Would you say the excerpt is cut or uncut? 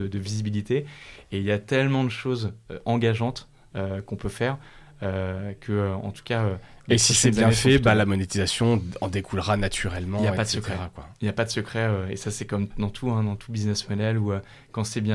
uncut